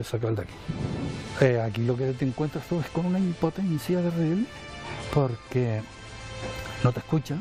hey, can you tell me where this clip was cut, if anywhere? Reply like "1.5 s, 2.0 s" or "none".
1.3 s

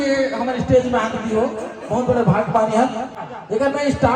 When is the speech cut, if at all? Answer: 3.1 s

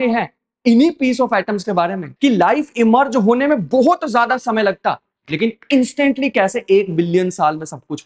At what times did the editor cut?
2.1 s

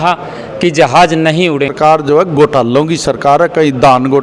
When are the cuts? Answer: 1.7 s

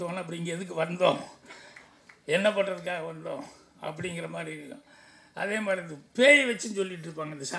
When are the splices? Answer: none

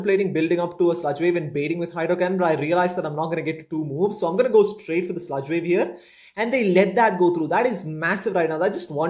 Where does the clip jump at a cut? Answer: none

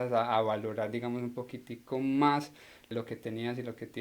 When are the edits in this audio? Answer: 2.9 s

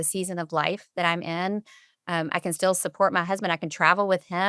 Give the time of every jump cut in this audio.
none

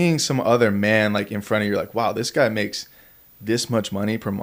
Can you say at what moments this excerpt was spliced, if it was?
none

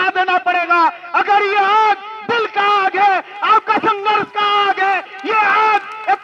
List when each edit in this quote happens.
none

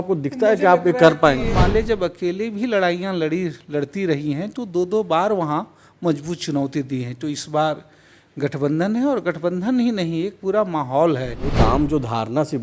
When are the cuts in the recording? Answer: 1.5 s, 11.4 s

